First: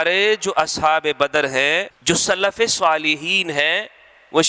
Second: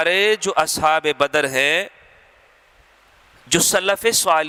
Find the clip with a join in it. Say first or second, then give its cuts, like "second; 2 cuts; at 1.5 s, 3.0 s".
first; 1 cut; at 1.9 s